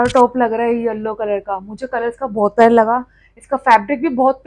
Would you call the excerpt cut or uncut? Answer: uncut